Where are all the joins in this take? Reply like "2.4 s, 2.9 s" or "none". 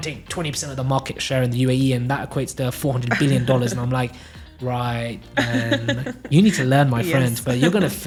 none